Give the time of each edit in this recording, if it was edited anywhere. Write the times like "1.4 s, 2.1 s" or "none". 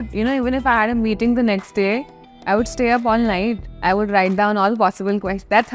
none